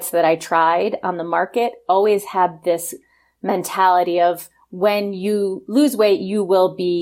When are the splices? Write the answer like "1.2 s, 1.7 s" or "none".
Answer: none